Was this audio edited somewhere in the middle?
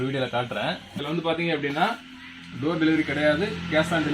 yes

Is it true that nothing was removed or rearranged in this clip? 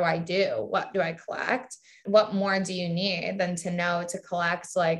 no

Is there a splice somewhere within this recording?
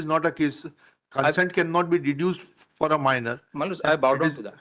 no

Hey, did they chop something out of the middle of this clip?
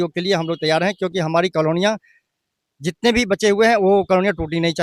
no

